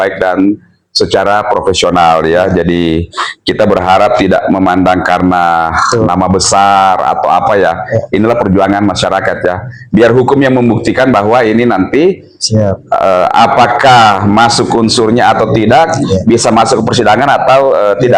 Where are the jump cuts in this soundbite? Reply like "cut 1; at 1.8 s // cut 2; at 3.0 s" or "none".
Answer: none